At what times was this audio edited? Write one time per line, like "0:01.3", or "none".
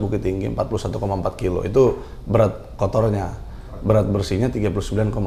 none